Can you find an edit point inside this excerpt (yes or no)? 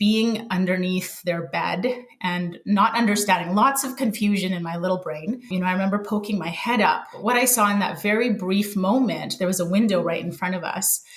yes